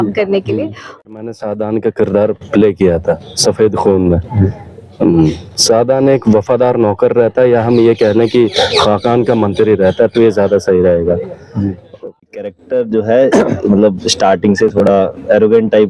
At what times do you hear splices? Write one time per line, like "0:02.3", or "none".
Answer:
0:01.0
0:12.4